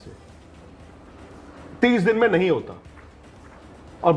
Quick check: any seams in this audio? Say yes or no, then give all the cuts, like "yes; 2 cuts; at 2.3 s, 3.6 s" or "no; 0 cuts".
no; 0 cuts